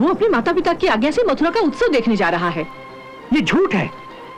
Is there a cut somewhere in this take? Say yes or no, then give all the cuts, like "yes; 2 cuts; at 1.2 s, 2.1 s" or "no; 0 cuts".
no; 0 cuts